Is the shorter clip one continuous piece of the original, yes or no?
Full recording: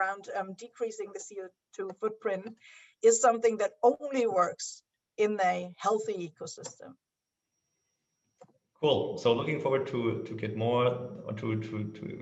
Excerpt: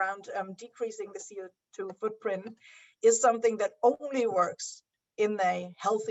yes